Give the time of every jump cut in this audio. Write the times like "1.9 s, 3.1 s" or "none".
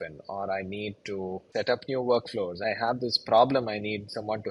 1.4 s, 2.6 s